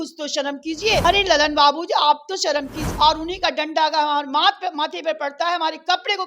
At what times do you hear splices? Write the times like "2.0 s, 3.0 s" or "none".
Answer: 1.0 s, 2.8 s